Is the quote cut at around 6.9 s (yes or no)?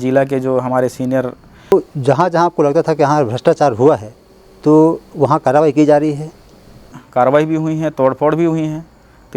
yes